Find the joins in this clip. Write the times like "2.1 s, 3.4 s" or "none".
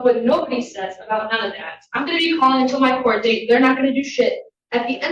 none